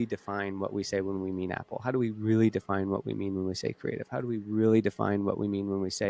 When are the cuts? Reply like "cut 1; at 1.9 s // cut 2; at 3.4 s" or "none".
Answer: none